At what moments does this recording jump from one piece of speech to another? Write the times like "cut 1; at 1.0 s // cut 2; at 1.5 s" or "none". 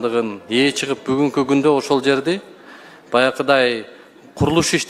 none